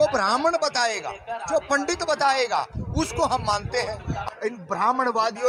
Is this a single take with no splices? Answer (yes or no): no